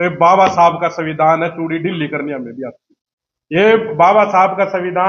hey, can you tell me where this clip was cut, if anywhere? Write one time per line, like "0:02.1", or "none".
none